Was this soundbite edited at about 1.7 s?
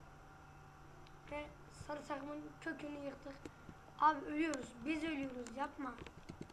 no; 0 cuts

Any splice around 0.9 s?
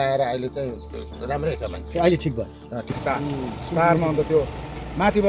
no; 1 cut; at 2.9 s

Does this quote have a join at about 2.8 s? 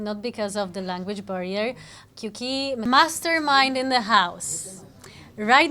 yes; 1 cut; at 2.8 s

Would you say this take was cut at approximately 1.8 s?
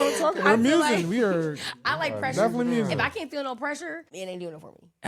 no; 1 cut; at 4.1 s

